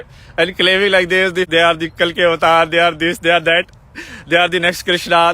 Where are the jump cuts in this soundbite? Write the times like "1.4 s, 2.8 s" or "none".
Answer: 1.5 s